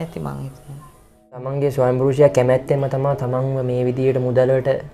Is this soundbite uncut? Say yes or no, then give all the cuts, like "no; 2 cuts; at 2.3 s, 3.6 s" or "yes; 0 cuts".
no; 1 cut; at 1.5 s